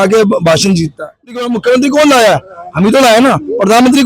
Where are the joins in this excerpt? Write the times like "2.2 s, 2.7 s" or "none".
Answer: 1.2 s

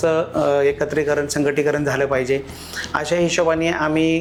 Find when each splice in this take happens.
none

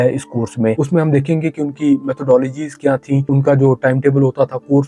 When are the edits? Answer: 3.3 s

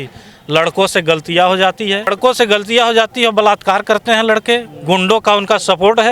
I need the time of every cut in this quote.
2.1 s

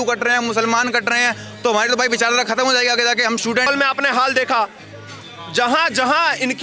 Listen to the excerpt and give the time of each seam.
3.7 s

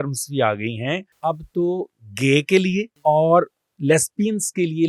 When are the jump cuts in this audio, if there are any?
1.1 s, 2.9 s

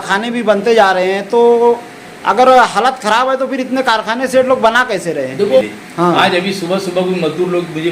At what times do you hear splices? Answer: 5.6 s

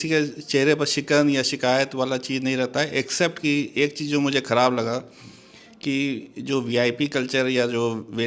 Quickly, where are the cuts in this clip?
none

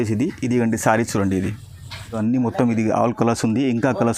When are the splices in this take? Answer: 2.1 s

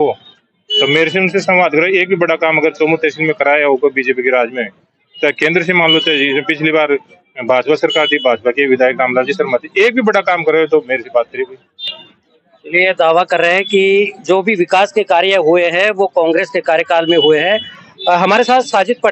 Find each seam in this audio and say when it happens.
none

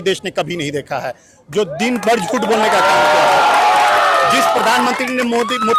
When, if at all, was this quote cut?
none

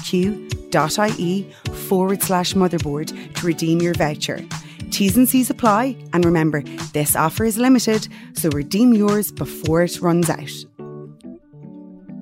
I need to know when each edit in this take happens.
10.3 s

